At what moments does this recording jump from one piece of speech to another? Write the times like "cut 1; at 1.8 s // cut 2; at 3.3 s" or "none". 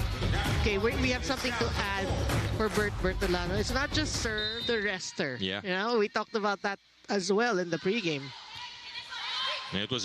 none